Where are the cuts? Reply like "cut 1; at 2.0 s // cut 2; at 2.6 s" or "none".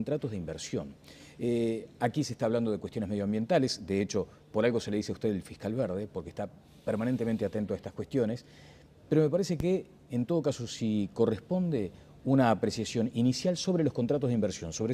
none